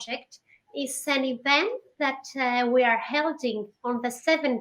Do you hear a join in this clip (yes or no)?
no